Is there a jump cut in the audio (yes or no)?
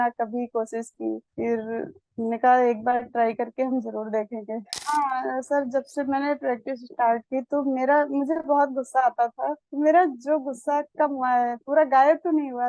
yes